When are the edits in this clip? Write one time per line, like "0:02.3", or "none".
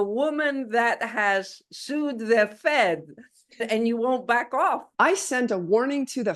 0:03.6
0:04.9